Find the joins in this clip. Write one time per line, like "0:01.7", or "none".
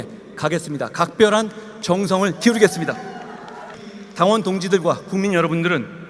0:03.9